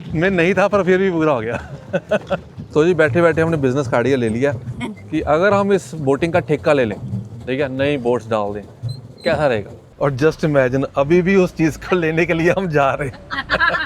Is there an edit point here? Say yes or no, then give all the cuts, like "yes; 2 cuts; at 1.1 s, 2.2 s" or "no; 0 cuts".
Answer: yes; 2 cuts; at 2.6 s, 9.8 s